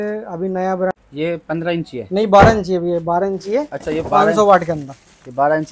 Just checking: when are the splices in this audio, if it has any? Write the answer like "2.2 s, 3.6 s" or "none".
0.9 s